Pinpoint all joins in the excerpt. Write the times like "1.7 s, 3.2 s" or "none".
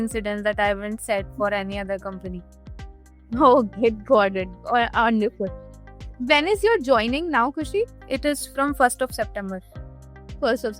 8.0 s